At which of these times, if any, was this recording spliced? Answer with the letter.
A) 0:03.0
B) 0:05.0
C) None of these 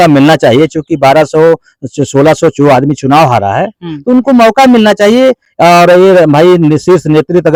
C